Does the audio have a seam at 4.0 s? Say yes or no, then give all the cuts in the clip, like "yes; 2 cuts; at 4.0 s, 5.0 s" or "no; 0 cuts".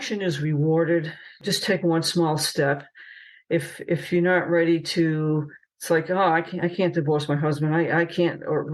no; 1 cut; at 1.4 s